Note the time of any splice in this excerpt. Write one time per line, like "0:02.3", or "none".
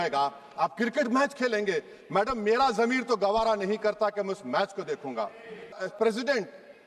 0:05.7